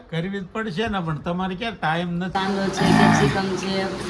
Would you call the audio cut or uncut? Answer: cut